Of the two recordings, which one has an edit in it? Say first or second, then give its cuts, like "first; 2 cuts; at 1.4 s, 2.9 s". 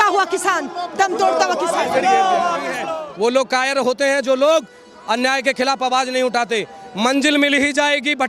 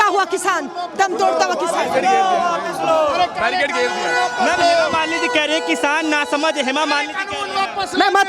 first; 1 cut; at 2.8 s